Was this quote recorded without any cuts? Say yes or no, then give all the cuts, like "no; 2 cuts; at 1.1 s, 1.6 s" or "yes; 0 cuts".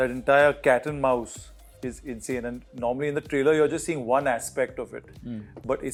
yes; 0 cuts